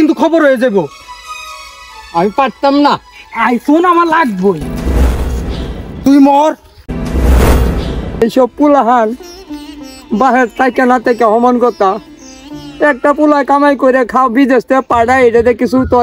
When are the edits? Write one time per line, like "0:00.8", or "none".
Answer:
0:08.2